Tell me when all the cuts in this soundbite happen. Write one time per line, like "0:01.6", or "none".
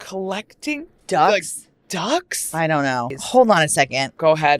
0:00.9
0:03.2

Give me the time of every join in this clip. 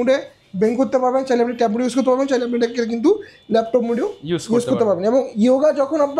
none

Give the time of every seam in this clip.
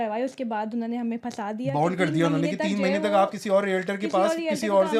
none

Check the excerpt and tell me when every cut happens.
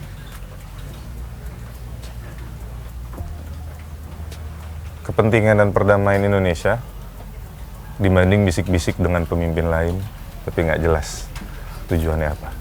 none

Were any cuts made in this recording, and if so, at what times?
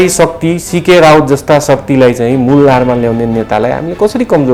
none

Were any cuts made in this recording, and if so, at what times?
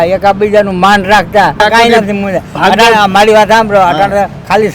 0:01.6

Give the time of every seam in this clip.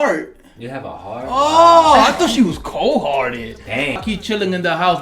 0:04.0

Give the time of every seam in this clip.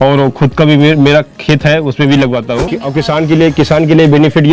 0:02.8

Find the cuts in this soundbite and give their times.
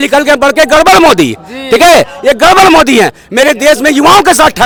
none

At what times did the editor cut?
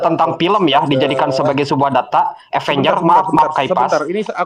none

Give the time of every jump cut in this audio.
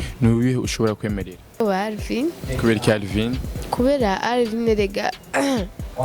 0:01.6

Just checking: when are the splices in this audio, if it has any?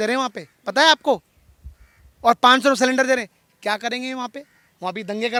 none

